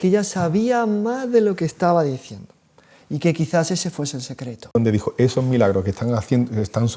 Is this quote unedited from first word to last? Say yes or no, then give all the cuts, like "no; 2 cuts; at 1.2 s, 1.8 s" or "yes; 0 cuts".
no; 1 cut; at 4.8 s